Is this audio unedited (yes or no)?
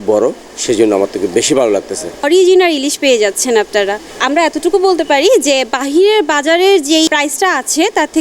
no